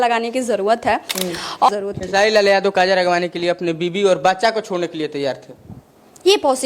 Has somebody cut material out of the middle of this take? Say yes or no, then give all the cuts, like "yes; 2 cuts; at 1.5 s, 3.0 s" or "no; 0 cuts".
yes; 1 cut; at 1.7 s